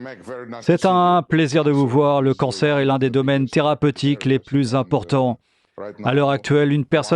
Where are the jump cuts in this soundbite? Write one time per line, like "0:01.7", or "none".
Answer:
0:05.4